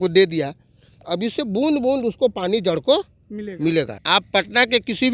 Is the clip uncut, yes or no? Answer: no